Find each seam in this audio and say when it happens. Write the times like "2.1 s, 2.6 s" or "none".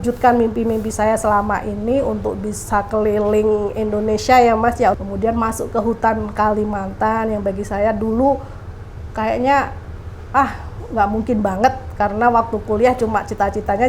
5.0 s